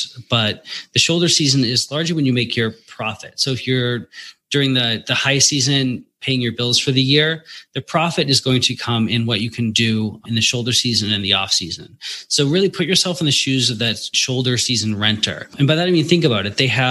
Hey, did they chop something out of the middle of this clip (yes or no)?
yes